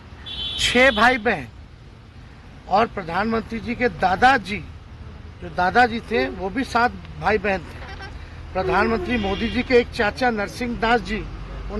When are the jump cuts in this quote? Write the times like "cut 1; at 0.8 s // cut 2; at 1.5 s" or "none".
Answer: none